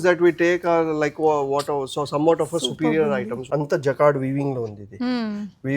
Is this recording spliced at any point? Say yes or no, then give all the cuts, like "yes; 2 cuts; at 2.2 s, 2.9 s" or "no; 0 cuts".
yes; 1 cut; at 3.4 s